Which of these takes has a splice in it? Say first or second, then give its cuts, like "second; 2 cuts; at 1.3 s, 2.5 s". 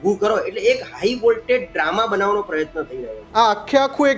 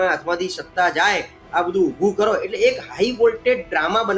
first; 1 cut; at 3.2 s